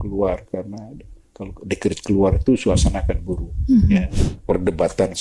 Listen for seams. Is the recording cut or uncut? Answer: cut